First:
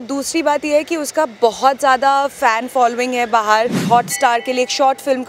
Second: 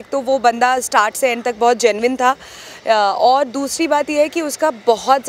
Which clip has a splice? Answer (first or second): first